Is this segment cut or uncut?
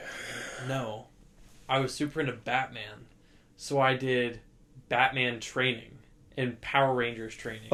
uncut